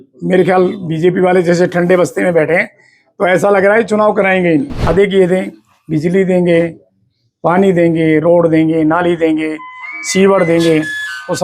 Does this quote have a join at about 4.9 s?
yes; 1 cut; at 4.9 s

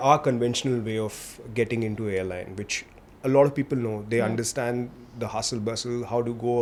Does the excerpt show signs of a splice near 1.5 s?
no; 0 cuts

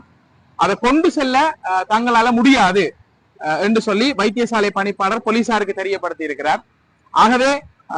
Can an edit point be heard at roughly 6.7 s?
no; 0 cuts

